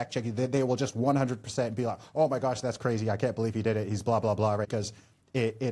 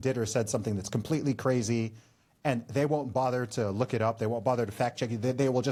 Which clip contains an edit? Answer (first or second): first